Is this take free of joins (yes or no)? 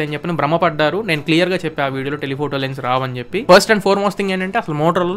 no